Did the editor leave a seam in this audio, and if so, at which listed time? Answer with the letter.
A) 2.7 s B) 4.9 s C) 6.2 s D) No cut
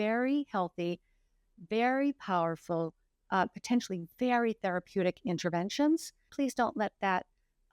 C